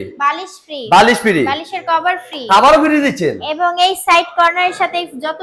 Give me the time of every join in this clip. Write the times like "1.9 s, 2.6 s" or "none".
none